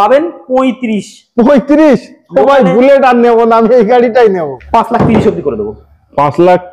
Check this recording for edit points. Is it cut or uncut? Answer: cut